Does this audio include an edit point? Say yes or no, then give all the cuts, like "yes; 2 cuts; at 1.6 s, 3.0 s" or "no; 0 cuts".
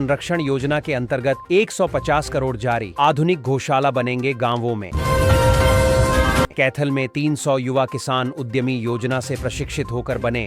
no; 0 cuts